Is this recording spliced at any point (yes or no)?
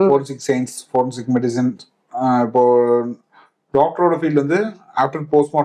no